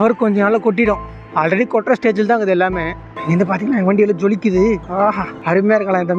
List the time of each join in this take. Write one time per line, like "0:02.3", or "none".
0:03.1